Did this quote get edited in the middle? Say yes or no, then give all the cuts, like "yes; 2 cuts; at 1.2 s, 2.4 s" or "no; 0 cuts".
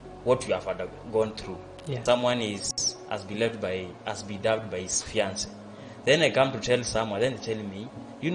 yes; 1 cut; at 2.0 s